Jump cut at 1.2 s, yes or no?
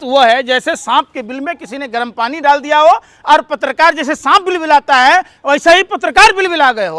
no